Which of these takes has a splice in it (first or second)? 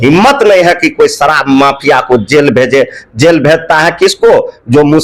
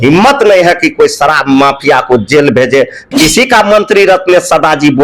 second